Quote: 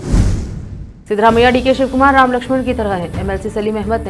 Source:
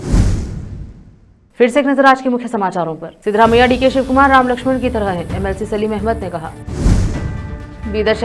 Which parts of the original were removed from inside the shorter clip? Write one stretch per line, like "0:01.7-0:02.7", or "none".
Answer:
0:00.9-0:03.1